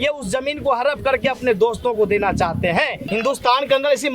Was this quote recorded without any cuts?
no; 1 cut; at 3.0 s

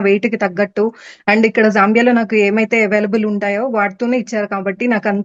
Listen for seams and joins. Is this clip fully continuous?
yes; 0 cuts

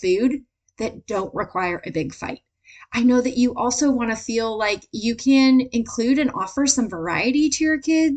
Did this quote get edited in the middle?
no; 0 cuts

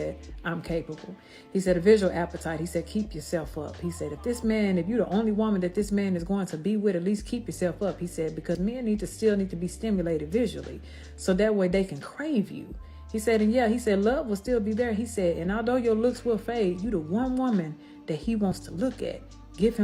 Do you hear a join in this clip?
yes; 1 cut; at 1.6 s

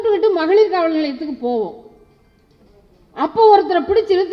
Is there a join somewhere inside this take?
no; 0 cuts

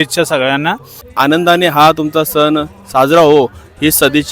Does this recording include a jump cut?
yes; 1 cut; at 1.1 s

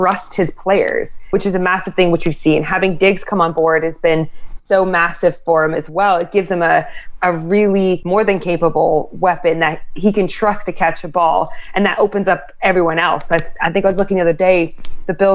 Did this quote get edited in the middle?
yes; 2 cuts; at 1.3 s, 8.0 s

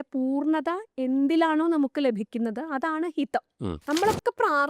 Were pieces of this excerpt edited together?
yes; 1 cut; at 3.8 s

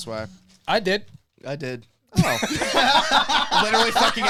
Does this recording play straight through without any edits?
yes; 0 cuts

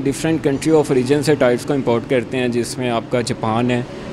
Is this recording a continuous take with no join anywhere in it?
yes; 0 cuts

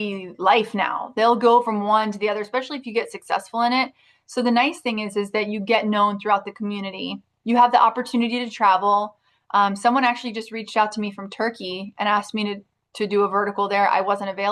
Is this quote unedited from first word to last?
yes; 0 cuts

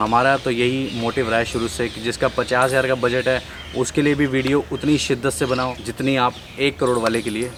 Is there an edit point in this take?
no; 0 cuts

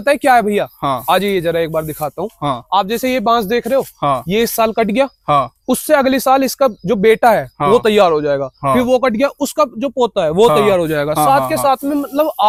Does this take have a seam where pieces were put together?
no; 0 cuts

